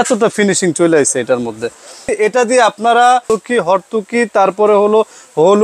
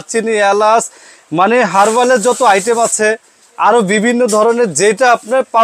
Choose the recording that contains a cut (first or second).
first